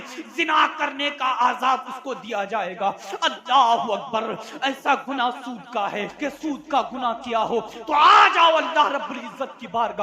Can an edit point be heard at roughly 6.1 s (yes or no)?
yes